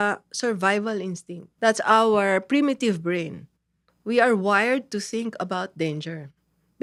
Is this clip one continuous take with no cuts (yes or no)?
yes